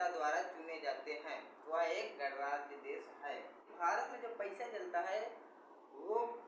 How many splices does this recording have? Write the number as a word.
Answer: one